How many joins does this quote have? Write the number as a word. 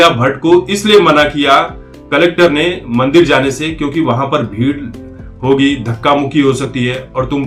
zero